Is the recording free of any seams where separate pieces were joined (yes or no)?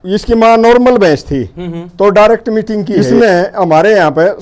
no